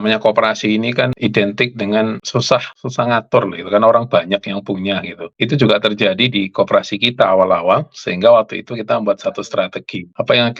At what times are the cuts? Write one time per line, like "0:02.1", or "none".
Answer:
0:01.1
0:02.5
0:05.2